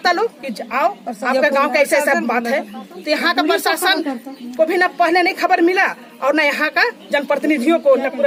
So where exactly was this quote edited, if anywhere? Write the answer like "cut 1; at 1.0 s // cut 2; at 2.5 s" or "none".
none